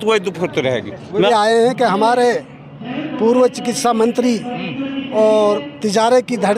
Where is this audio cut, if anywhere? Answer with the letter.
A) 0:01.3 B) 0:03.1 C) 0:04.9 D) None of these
A